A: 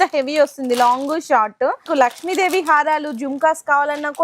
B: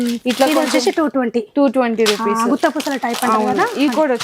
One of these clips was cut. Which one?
A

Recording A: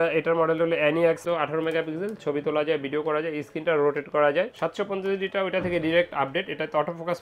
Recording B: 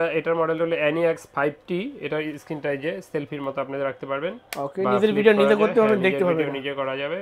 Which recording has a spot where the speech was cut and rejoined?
A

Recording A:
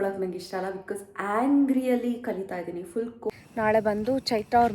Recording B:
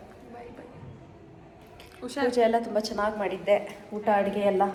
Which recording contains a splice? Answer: A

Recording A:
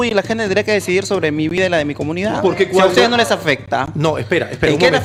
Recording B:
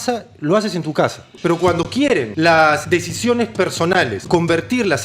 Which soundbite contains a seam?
B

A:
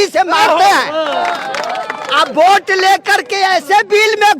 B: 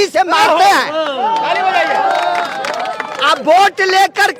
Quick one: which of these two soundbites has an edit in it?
A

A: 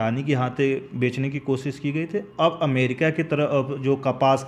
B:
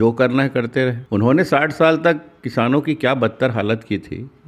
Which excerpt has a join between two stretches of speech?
B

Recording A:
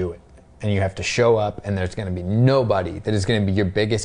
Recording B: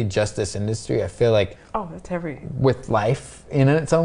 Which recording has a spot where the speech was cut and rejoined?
B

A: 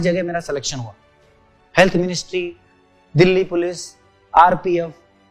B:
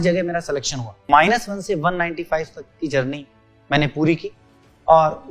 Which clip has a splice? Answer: B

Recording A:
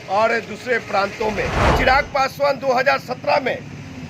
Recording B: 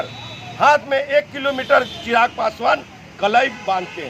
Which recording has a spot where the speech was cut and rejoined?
A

